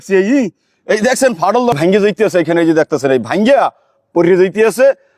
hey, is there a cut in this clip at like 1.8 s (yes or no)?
yes